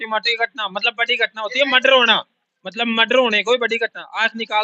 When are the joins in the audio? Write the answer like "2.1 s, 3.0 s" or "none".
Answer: none